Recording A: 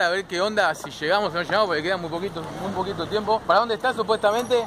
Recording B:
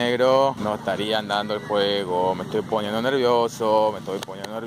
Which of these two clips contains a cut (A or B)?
A